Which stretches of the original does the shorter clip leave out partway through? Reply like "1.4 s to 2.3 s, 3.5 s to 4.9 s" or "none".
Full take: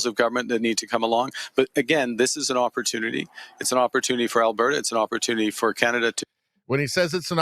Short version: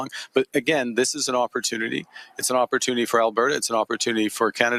none